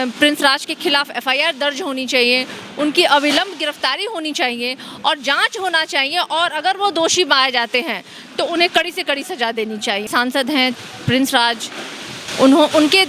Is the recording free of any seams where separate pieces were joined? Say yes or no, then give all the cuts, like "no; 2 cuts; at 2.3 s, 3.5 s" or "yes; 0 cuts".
no; 1 cut; at 10.1 s